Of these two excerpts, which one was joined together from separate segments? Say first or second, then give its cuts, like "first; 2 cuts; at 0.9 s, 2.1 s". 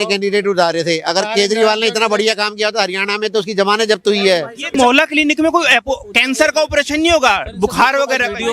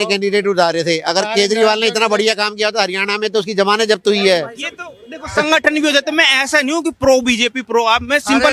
first; 1 cut; at 4.7 s